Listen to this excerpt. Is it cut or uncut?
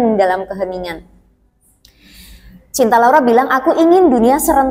uncut